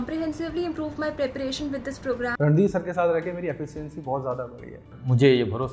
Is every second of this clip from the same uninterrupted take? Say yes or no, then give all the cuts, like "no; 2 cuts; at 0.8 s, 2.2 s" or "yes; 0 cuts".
no; 1 cut; at 2.3 s